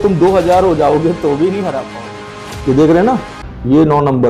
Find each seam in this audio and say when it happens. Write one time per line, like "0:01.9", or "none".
0:01.9